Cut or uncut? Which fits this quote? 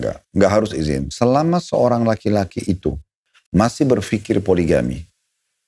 cut